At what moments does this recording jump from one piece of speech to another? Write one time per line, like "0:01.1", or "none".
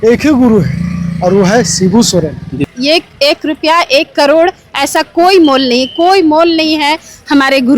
0:02.6